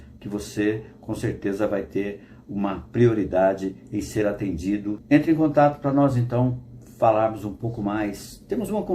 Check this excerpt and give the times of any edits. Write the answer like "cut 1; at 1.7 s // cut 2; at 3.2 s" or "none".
cut 1; at 5.0 s